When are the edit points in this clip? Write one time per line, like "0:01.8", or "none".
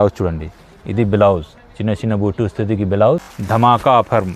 0:03.3